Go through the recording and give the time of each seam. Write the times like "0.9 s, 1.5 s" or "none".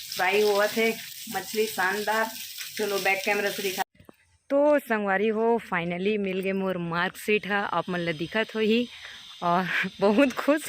4.0 s